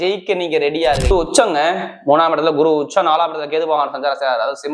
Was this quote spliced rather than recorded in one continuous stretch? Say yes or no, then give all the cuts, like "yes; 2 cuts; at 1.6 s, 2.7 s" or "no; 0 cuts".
yes; 1 cut; at 1.1 s